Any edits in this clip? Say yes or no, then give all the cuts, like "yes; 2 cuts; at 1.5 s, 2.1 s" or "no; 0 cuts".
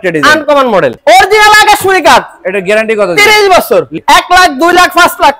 yes; 2 cuts; at 1.0 s, 3.9 s